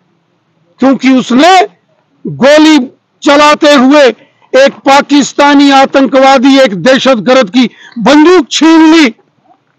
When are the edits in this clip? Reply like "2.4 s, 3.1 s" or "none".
none